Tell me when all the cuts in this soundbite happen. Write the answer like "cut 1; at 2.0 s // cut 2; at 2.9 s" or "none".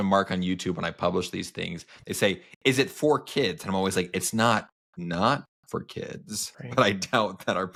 none